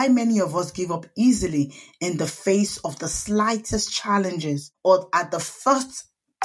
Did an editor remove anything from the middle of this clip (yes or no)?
yes